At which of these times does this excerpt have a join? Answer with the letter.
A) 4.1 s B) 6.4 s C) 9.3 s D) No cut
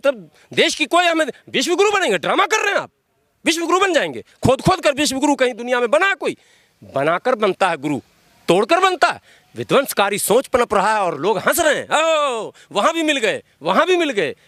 D